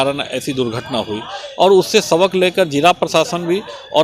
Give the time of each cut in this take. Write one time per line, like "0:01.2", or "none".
none